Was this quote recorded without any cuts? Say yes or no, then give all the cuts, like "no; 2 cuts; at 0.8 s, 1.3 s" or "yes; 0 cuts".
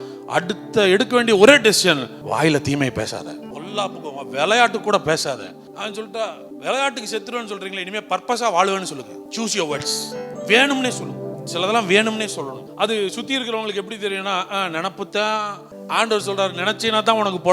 no; 8 cuts; at 2.1 s, 3.5 s, 6.0 s, 9.2 s, 10.3 s, 11.3 s, 12.6 s, 15.7 s